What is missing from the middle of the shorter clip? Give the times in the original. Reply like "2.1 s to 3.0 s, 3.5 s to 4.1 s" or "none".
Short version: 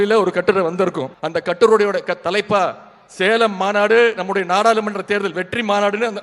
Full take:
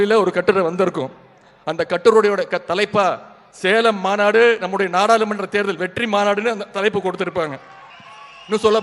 1.1 s to 1.6 s

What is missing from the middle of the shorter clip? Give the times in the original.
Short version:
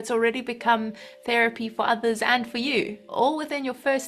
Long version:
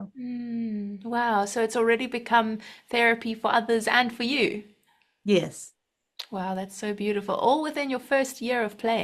4.7 s to 7.3 s

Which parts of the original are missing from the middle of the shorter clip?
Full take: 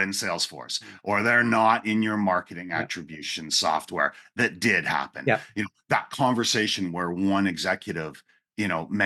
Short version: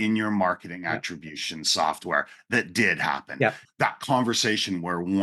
5.5 s to 5.7 s

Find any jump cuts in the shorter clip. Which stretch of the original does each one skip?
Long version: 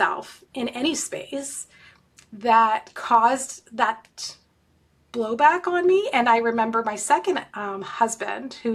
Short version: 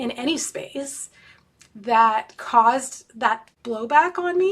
4.1 s to 5.0 s

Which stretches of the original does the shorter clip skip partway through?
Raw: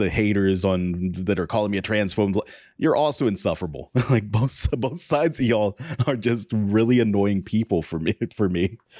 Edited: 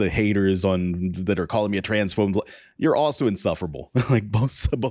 none

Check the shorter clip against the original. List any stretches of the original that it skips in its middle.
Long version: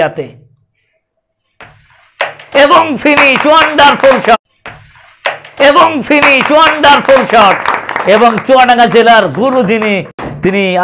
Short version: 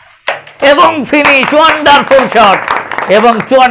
4.3 s to 7.4 s

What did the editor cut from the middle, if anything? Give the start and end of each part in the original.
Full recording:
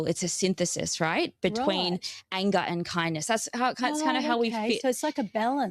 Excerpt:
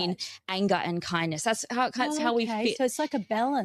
4.0 s to 4.2 s

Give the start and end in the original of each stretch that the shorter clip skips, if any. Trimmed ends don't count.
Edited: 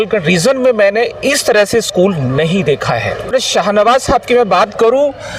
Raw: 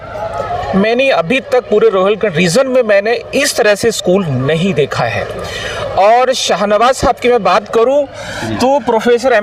5.4 s to 6.3 s

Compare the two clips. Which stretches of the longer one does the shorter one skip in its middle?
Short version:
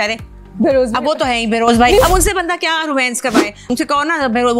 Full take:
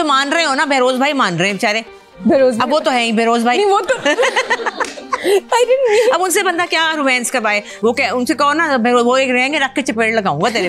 3.6 s to 6.1 s, 7.8 s to 8.2 s

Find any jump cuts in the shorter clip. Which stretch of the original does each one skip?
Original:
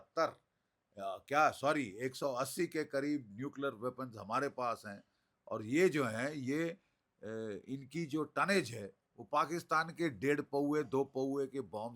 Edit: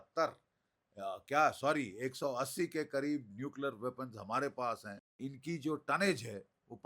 5.1 s to 7.6 s

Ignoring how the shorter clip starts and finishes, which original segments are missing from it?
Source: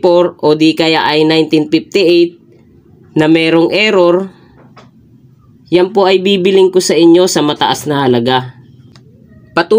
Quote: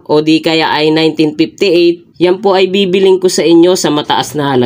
2.4 s to 5.6 s

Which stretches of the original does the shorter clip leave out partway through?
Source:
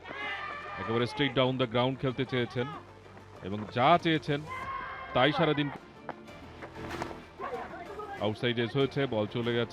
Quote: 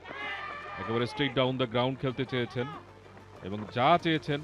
none

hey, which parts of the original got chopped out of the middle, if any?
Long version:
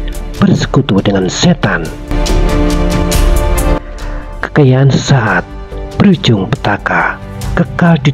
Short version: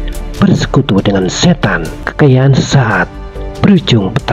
2.0 s to 4.3 s

